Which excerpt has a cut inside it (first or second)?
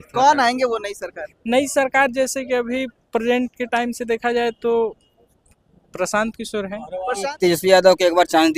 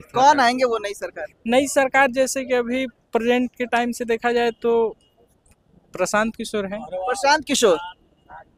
first